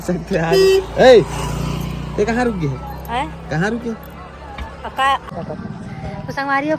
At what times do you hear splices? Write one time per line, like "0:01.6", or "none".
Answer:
0:05.3

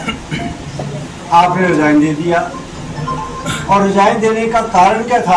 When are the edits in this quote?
none

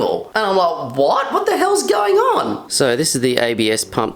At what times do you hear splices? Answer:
0:02.6

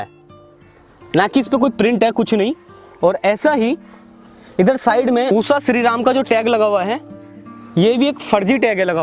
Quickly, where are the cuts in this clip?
0:05.3

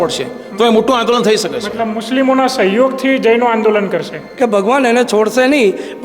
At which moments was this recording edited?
0:04.2

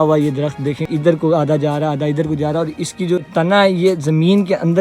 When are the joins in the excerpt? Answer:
0:00.8
0:03.3

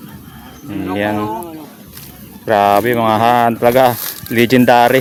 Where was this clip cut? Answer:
none

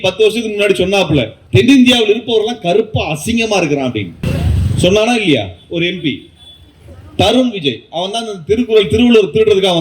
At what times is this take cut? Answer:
0:01.4
0:04.2

